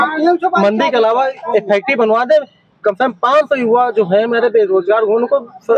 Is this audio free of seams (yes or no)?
yes